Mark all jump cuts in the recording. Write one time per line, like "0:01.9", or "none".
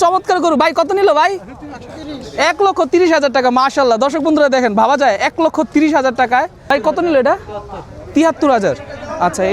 0:06.6